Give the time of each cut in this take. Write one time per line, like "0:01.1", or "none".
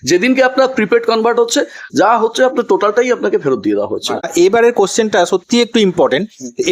none